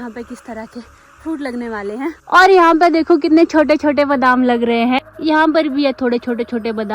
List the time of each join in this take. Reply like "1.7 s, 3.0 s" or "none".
2.2 s, 5.0 s